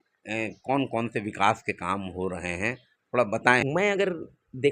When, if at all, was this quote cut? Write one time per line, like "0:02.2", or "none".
0:03.6